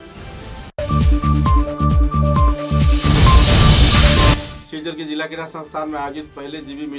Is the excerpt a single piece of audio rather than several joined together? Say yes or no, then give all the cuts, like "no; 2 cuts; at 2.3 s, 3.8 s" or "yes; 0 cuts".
no; 1 cut; at 4.3 s